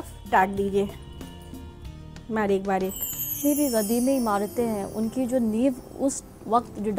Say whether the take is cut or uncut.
cut